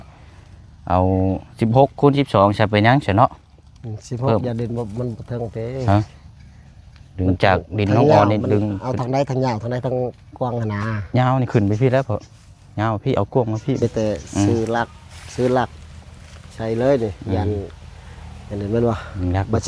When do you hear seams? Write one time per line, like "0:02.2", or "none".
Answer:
0:13.8